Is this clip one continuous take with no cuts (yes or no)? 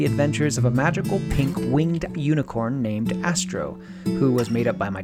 yes